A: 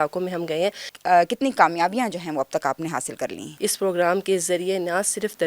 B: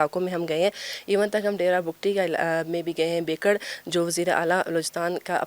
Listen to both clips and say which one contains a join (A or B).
A